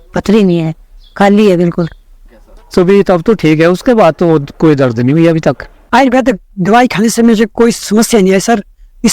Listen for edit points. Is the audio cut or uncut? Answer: cut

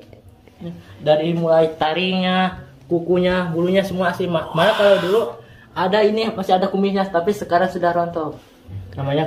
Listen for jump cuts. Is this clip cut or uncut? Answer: cut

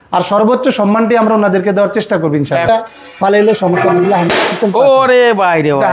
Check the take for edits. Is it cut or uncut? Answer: cut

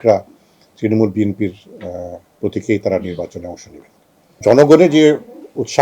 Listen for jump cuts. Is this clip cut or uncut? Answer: cut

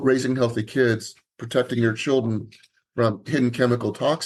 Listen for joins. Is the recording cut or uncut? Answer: uncut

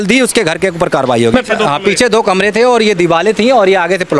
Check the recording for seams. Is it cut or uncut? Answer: cut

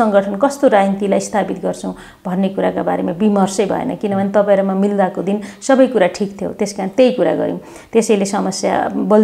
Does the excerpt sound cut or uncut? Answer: uncut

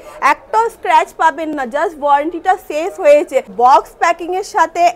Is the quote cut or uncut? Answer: cut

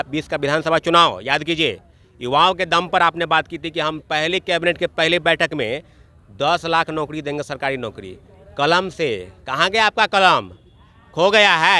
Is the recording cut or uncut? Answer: uncut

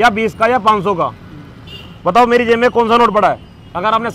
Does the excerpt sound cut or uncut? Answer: uncut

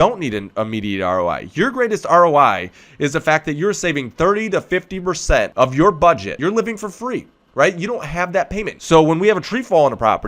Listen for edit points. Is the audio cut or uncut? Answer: cut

